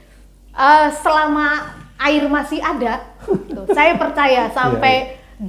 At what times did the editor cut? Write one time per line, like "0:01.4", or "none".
none